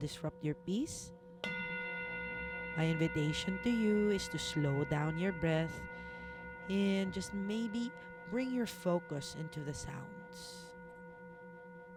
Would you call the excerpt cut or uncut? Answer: uncut